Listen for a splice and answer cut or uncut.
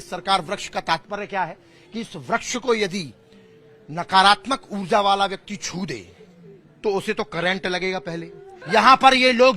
cut